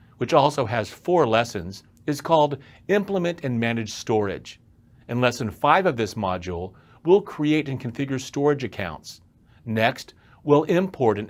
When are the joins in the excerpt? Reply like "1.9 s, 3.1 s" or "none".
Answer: none